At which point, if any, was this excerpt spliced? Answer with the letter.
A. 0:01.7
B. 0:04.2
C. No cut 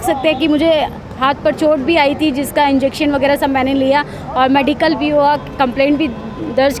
C